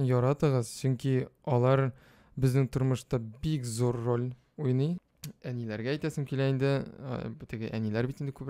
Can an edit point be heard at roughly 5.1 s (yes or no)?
yes